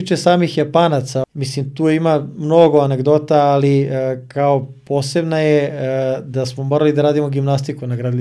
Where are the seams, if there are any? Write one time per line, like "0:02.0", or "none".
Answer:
0:01.2

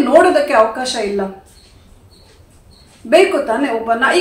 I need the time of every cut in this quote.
none

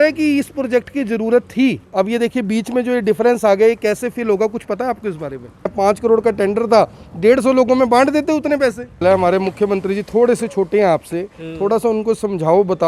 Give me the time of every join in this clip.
0:05.7
0:09.0

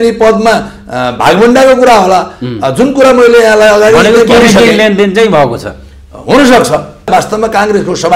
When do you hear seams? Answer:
0:07.1

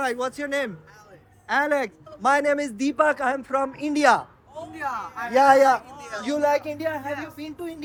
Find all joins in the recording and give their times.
none

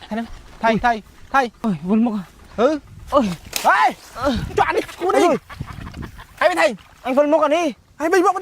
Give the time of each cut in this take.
0:01.6

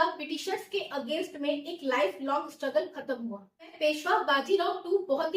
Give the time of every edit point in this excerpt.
0:03.7

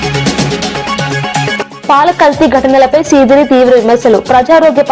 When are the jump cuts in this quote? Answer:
0:01.0
0:01.7

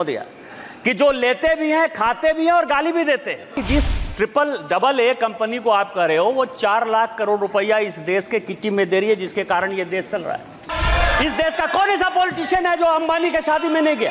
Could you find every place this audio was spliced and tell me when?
0:03.6
0:10.7

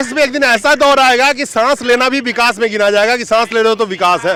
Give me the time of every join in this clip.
none

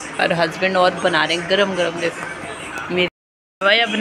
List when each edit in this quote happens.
0:03.1

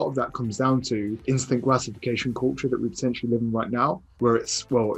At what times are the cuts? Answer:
0:01.2
0:04.1

